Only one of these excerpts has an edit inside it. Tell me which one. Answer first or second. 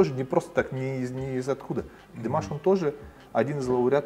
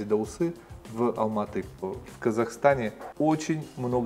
second